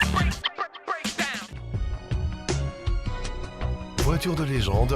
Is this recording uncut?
no; 1 cut; at 1.6 s

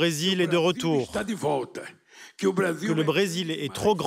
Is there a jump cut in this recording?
yes; 2 cuts; at 1.1 s, 2.9 s

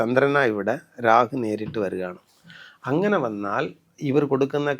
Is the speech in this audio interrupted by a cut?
yes; 1 cut; at 3.8 s

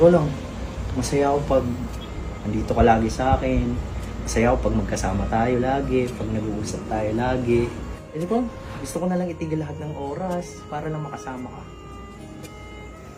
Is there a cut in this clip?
yes; 2 cuts; at 7.9 s, 8.6 s

